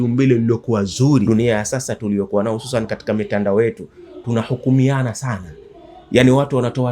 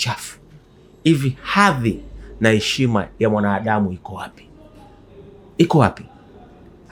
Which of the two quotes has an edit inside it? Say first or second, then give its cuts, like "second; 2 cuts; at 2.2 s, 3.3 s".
first; 1 cut; at 1.3 s